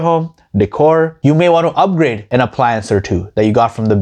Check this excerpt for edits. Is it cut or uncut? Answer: uncut